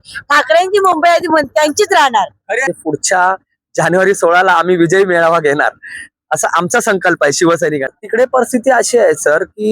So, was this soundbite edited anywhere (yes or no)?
yes